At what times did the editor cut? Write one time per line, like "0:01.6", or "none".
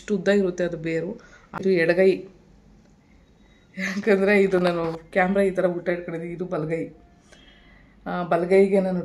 0:01.6

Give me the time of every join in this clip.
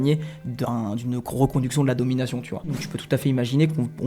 0:02.9

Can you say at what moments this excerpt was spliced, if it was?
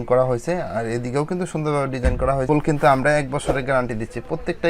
0:02.5

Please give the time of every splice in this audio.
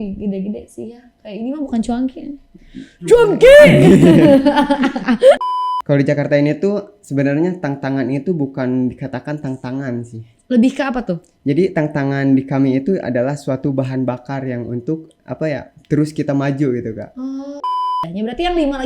0:05.4
0:17.8

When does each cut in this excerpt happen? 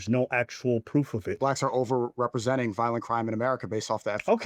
0:01.2

